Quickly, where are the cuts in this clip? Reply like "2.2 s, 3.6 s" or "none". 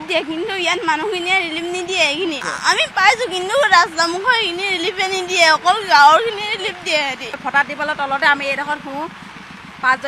2.5 s, 7.4 s